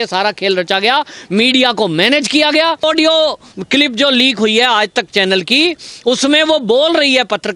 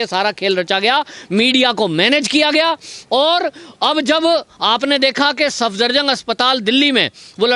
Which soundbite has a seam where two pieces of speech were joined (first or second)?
first